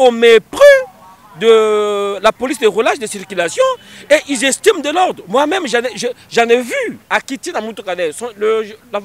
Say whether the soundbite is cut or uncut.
cut